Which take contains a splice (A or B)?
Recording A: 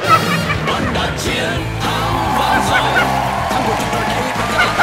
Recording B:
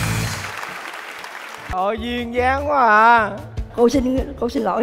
B